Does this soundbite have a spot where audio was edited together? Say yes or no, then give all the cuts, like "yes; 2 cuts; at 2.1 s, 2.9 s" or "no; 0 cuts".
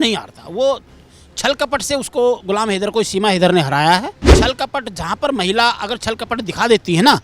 yes; 1 cut; at 4.2 s